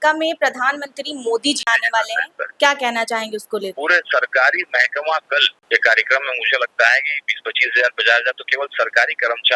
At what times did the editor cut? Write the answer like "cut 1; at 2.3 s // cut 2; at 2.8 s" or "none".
cut 1; at 1.6 s // cut 2; at 3.7 s // cut 3; at 5.5 s